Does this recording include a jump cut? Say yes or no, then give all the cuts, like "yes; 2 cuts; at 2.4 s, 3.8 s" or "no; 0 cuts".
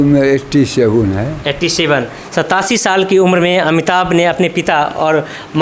no; 0 cuts